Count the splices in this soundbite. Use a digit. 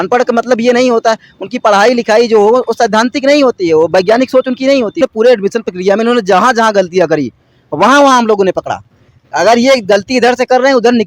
1